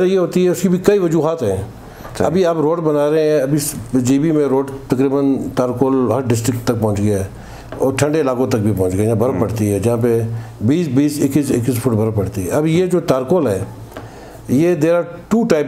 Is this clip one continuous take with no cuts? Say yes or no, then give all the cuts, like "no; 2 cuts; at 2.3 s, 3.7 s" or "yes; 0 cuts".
yes; 0 cuts